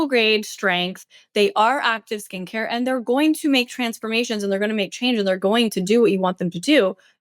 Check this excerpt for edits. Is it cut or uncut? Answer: uncut